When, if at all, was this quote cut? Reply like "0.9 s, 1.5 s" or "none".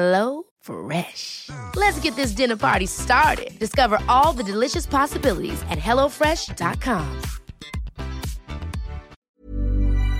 9.1 s